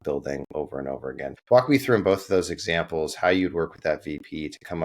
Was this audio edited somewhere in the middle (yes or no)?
yes